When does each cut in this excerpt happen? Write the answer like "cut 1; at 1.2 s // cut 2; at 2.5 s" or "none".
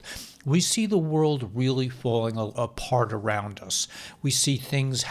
cut 1; at 2.6 s